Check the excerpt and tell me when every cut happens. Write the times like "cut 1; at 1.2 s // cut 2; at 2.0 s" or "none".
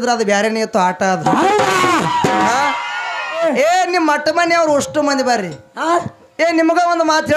cut 1; at 3.4 s

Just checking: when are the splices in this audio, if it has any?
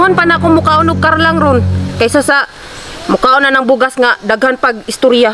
none

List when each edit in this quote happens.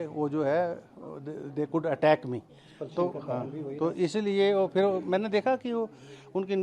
none

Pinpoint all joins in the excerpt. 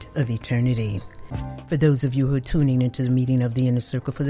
cut 1; at 1.3 s

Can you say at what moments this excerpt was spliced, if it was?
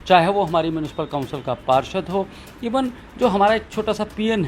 none

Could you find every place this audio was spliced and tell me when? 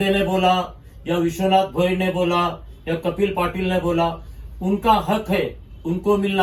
none

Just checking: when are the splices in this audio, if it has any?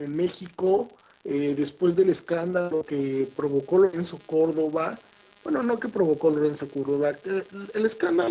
cut 1; at 6.0 s

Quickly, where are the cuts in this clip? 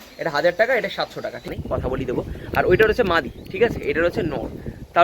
cut 1; at 1.5 s

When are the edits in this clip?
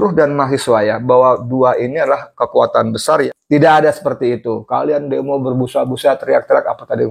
cut 1; at 3.2 s

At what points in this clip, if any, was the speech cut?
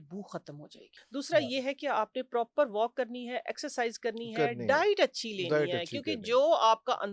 cut 1; at 0.9 s

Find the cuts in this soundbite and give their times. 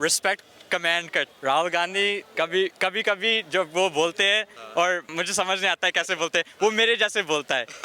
cut 1; at 1.3 s // cut 2; at 2.3 s // cut 3; at 5.1 s

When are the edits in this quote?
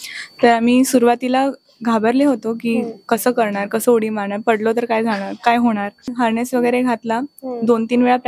cut 1; at 6.1 s

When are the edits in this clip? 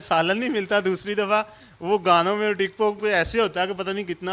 none

